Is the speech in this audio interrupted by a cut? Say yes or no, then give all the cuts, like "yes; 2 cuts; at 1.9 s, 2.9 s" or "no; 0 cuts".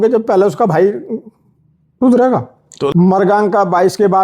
yes; 1 cut; at 2.9 s